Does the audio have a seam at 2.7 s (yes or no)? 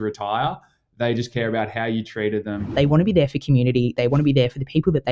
yes